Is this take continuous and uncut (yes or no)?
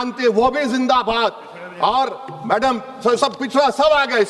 yes